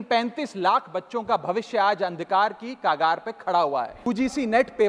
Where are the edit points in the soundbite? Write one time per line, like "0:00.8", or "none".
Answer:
0:04.0